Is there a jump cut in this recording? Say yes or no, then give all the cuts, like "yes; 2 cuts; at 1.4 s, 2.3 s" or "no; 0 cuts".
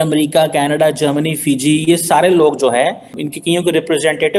yes; 1 cut; at 3.2 s